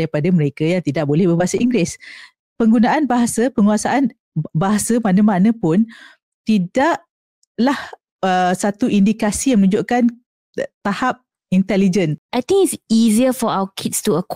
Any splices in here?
yes; 1 cut; at 12.2 s

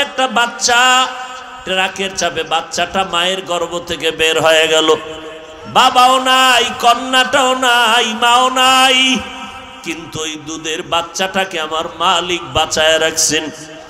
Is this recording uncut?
yes; 0 cuts

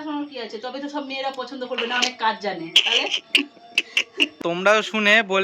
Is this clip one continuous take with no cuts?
no; 2 cuts; at 2.8 s, 4.4 s

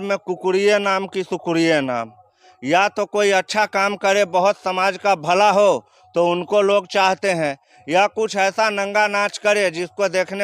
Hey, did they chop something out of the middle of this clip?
no; 0 cuts

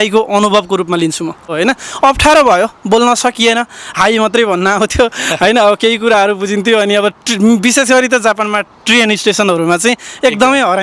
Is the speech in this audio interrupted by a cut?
yes; 1 cut; at 1.5 s

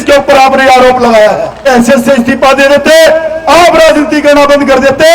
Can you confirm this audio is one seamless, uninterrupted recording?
no; 1 cut; at 1.6 s

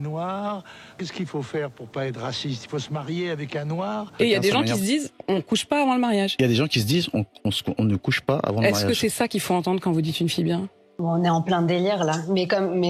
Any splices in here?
yes; 3 cuts; at 0.9 s, 4.1 s, 10.8 s

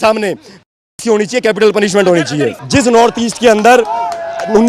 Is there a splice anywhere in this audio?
yes; 1 cut; at 2.6 s

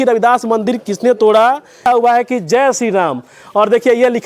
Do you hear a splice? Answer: yes; 1 cut; at 1.8 s

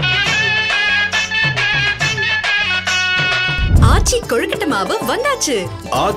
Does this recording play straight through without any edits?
yes; 0 cuts

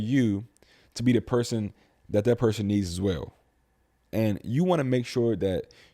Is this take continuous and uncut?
no; 1 cut; at 3.9 s

